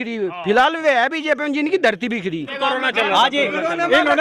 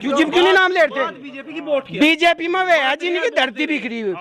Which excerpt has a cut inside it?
first; 1 cut; at 2.5 s

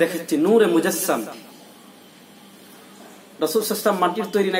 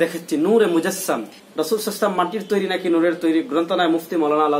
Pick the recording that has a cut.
second; 1 cut; at 1.4 s

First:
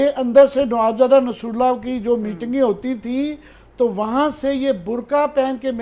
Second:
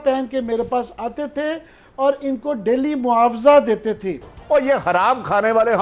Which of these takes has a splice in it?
second; 1 cut; at 4.3 s

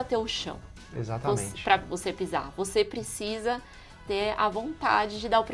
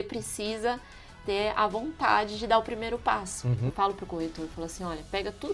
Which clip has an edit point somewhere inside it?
second; 1 cut; at 3.7 s

